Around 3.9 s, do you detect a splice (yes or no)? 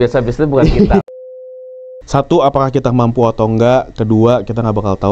no